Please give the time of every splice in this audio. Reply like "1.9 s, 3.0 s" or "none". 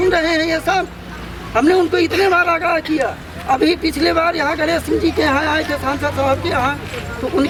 none